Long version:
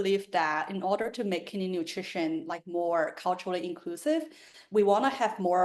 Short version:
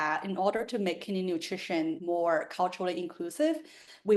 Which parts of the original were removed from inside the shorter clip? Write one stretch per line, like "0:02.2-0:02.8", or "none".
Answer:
0:02.4-0:02.7

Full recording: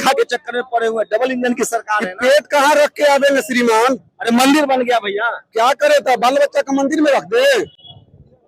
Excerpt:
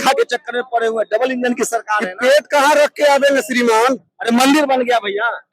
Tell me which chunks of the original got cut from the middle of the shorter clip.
none

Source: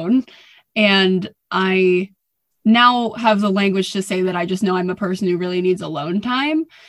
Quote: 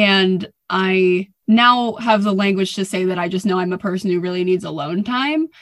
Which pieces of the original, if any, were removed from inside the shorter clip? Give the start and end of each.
0:02.1-0:02.5

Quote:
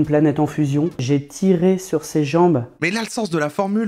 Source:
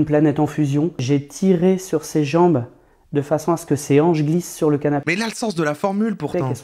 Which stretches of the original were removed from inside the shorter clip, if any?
0:02.8-0:05.1

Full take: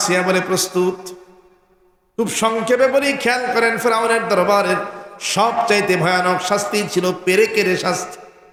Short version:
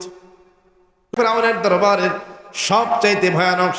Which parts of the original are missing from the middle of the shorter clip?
0:02.1-0:03.7

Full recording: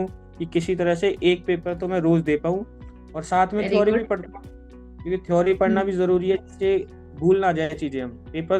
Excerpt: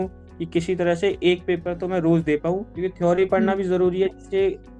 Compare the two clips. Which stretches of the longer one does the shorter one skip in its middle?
0:02.7-0:05.0

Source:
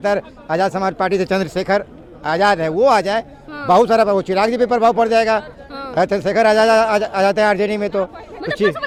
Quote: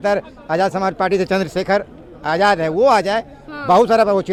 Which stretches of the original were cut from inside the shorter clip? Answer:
none

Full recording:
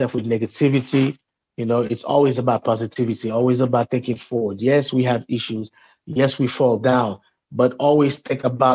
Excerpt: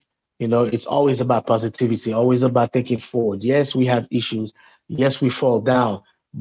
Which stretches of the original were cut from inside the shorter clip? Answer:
none

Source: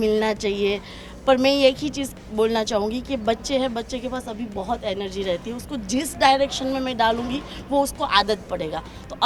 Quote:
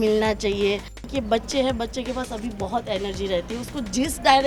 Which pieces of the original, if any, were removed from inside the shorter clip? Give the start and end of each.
0:01.1-0:03.1

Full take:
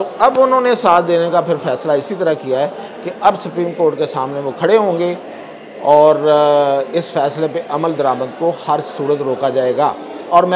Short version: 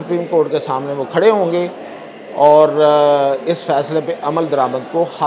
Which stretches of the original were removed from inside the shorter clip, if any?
none

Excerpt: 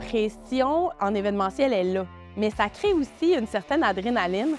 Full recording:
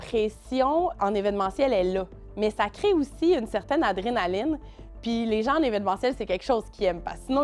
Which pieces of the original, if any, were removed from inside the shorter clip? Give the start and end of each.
none

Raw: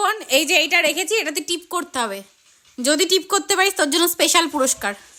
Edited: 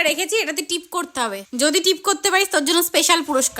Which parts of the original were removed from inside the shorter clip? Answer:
0:02.2-0:02.7

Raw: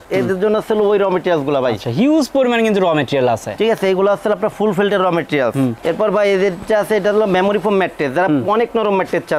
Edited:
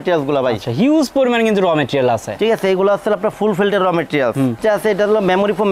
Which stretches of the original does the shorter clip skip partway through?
0:05.8-0:06.6

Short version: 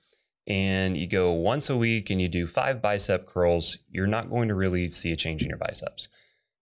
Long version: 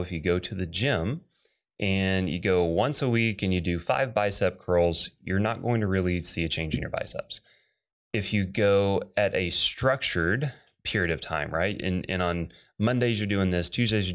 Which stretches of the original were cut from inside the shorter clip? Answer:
none

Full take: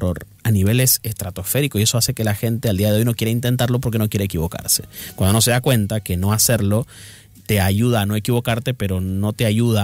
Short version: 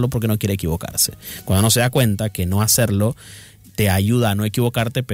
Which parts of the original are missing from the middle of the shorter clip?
none

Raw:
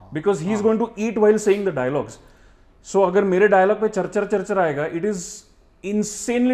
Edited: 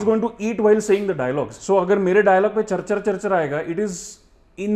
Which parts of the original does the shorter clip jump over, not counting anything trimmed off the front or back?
0:02.1-0:02.8

